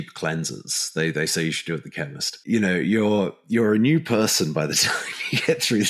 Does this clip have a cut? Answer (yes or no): yes